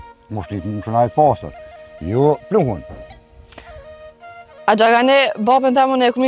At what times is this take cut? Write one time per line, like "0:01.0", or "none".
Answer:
none